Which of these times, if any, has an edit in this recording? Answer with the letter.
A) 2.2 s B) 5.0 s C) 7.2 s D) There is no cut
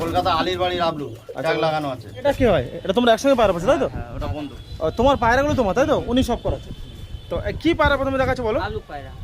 A